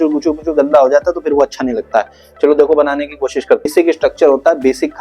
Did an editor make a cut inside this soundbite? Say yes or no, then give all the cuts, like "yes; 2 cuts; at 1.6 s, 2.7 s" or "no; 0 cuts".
yes; 1 cut; at 3.7 s